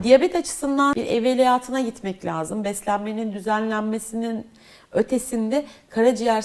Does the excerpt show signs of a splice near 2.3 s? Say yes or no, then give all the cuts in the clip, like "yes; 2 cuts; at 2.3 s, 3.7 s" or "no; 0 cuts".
no; 1 cut; at 1.0 s